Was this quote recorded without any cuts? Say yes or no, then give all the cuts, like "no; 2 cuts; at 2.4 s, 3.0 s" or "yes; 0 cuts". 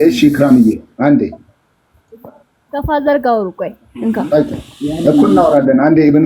yes; 0 cuts